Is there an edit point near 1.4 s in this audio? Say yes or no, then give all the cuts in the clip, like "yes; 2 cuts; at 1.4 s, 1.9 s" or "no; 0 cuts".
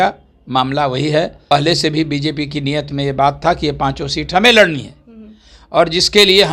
yes; 1 cut; at 1.4 s